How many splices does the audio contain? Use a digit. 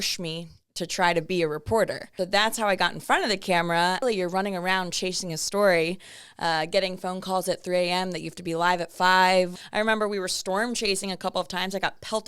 3